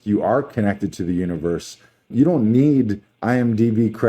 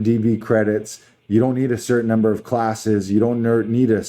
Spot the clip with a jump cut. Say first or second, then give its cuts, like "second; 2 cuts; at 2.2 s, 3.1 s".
first; 1 cut; at 2.1 s